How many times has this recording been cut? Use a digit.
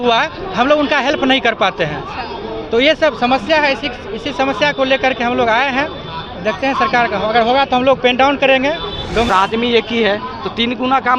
1